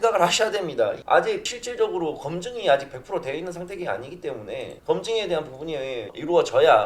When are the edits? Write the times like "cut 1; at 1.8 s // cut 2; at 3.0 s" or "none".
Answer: cut 1; at 1.1 s

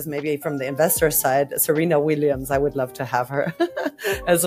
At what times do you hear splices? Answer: none

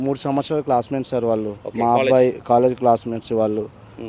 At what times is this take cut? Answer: cut 1; at 1.6 s

